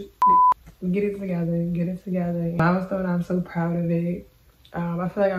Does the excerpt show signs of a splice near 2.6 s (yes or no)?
yes